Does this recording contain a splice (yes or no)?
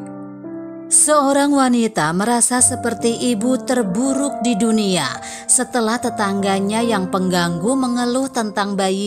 yes